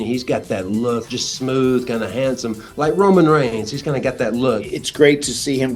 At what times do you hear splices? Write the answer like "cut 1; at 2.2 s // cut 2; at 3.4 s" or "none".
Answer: cut 1; at 1.0 s // cut 2; at 4.7 s

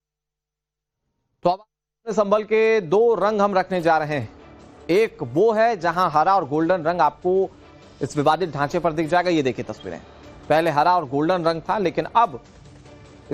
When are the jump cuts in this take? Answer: none

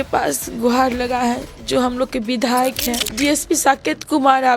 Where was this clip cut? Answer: cut 1; at 3.1 s

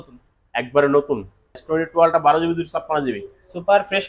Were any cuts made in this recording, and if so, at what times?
cut 1; at 1.6 s

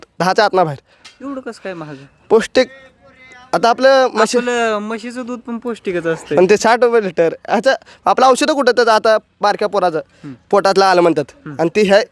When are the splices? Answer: cut 1; at 1.1 s

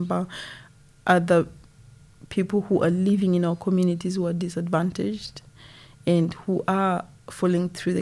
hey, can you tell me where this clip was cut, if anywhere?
none

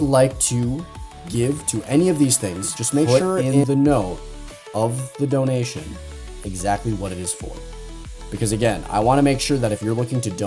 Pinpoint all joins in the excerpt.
cut 1; at 3.1 s

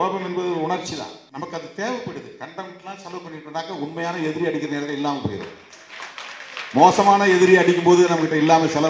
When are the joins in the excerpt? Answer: cut 1; at 1.2 s

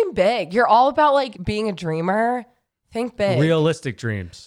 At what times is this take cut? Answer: cut 1; at 1.4 s

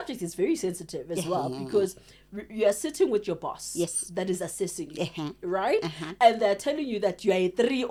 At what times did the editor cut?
none

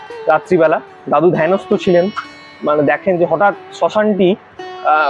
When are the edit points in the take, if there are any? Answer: cut 1; at 0.9 s

